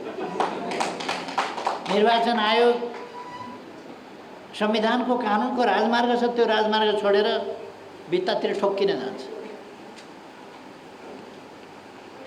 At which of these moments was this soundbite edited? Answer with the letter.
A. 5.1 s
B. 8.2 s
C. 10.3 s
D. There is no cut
D